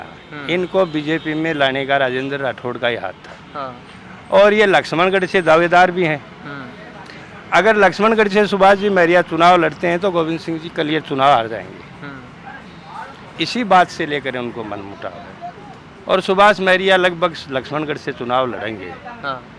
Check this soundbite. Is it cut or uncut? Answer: uncut